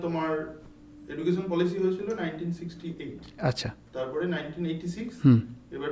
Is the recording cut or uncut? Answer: uncut